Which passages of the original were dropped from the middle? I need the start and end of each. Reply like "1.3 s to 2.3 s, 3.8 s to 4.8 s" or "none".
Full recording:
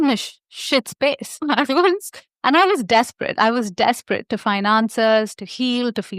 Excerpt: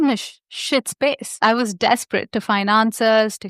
1.3 s to 3.2 s